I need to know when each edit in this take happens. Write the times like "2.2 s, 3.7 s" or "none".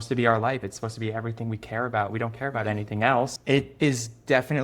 3.4 s